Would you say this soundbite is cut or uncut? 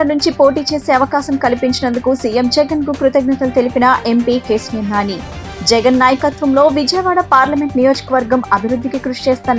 uncut